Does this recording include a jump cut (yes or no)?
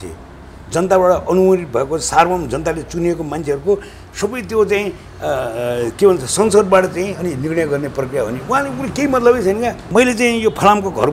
yes